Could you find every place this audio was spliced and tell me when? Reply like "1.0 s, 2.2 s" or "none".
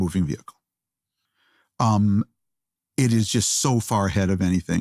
none